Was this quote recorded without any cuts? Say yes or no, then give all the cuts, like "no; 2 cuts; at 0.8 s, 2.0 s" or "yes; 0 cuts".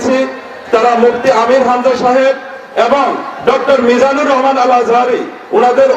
yes; 0 cuts